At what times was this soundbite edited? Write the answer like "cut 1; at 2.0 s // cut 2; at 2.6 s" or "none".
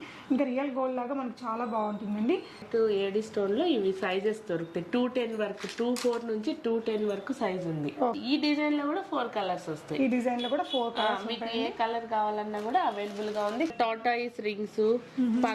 cut 1; at 2.6 s // cut 2; at 8.2 s // cut 3; at 13.7 s